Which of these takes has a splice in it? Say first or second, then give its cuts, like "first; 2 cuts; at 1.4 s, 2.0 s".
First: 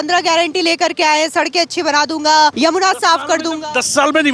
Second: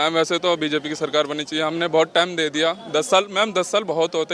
first; 1 cut; at 2.5 s